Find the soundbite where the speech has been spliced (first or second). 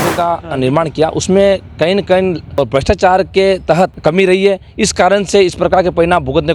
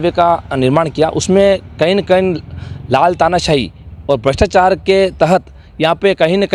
first